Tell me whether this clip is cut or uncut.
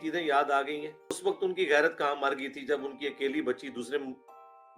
cut